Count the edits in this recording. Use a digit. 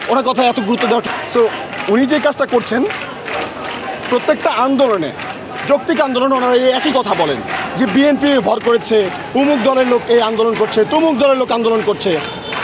1